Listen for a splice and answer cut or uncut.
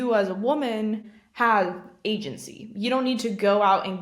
cut